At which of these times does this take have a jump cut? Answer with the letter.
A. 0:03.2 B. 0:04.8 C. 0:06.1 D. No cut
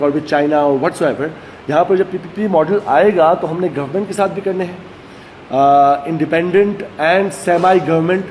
D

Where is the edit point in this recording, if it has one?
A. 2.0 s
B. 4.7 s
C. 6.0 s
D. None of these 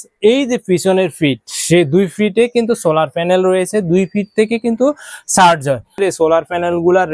C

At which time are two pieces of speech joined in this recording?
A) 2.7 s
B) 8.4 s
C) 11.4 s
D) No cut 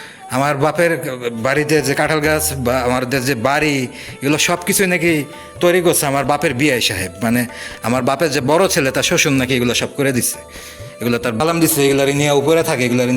C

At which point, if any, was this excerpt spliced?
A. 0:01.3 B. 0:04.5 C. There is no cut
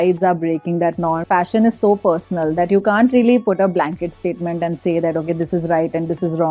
A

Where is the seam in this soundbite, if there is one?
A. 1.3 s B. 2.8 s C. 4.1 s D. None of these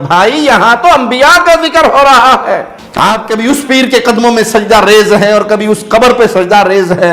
B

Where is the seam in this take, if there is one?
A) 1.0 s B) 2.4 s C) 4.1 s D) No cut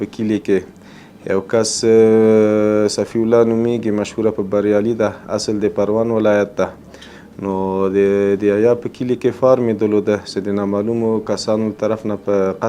D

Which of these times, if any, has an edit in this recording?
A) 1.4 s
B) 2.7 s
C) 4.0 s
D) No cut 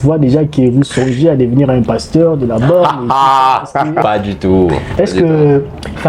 C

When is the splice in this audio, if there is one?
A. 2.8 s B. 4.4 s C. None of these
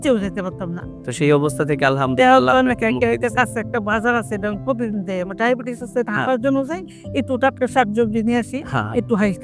C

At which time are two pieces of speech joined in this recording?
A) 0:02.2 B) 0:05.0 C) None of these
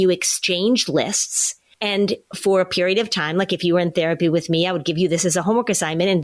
C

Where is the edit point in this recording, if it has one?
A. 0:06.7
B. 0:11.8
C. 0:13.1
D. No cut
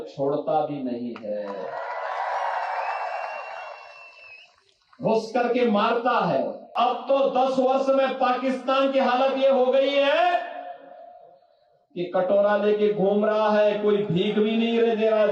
A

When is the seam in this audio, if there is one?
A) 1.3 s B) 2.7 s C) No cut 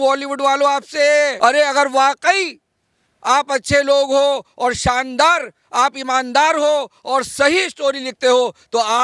A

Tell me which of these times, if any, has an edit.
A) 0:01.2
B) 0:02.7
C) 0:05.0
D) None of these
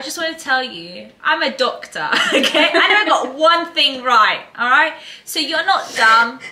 D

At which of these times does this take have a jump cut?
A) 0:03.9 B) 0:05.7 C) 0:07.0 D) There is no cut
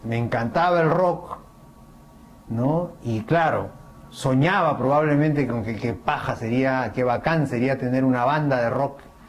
C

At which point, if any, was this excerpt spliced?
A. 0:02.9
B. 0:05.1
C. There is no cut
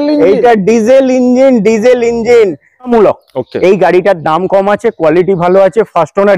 A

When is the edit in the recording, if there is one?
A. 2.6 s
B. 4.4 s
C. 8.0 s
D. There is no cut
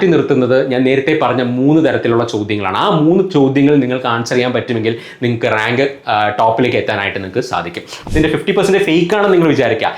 C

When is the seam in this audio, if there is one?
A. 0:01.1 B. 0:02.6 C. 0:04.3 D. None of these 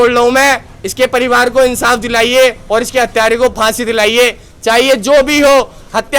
D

